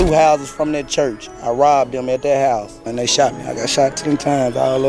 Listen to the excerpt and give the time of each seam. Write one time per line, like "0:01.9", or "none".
0:02.9